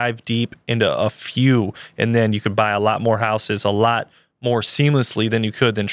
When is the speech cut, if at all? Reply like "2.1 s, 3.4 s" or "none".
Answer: none